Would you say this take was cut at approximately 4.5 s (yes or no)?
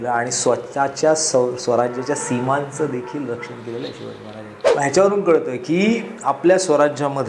yes